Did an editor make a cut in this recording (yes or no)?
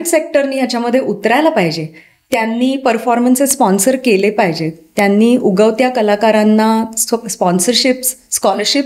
no